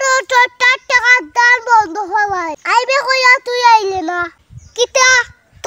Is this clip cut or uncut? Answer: cut